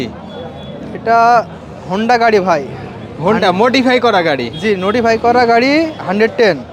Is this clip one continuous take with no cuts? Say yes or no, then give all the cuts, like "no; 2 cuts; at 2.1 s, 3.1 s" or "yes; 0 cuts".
yes; 0 cuts